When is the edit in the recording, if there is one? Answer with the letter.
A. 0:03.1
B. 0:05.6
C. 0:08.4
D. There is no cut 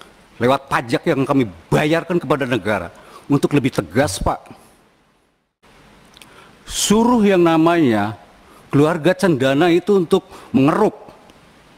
B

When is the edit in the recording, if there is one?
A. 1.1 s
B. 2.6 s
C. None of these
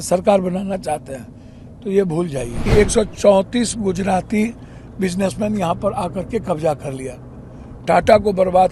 B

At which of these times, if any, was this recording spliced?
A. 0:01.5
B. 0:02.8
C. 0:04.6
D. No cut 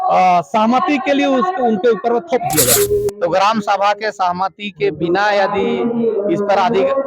B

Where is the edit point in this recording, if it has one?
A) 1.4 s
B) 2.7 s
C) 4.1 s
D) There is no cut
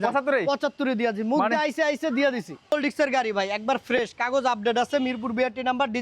B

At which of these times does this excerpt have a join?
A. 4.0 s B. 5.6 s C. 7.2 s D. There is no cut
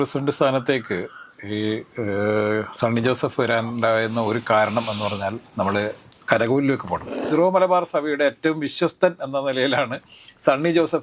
C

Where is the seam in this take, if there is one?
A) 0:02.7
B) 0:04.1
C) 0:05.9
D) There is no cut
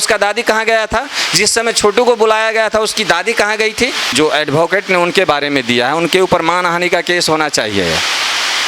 B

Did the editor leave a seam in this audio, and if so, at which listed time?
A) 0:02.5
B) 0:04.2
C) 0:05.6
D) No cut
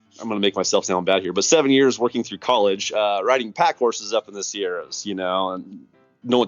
D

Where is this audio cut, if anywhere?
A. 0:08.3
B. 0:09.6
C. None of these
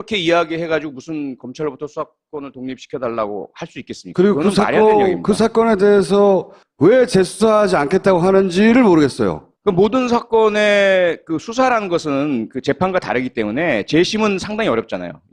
A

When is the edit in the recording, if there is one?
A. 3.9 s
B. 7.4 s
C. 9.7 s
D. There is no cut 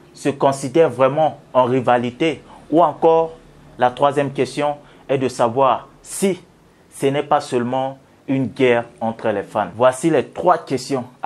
C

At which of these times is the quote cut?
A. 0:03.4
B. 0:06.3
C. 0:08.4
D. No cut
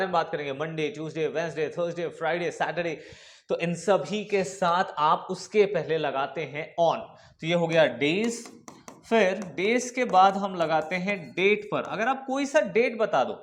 D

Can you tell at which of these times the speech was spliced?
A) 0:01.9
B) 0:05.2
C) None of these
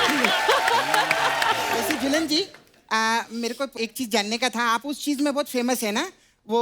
A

